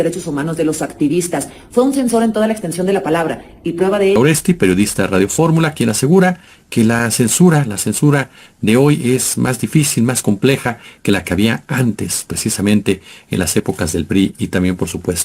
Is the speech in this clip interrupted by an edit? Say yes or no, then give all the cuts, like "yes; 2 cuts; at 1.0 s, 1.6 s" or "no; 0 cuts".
yes; 1 cut; at 4.2 s